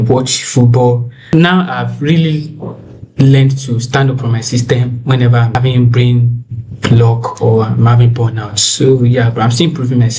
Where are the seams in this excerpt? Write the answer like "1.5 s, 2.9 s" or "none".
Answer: 1.1 s, 5.5 s